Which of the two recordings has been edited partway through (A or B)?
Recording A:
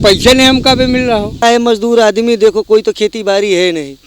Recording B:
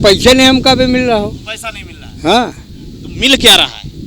A